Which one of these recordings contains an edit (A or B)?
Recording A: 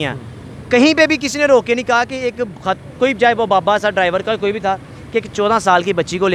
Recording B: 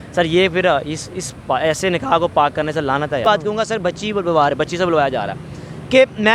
B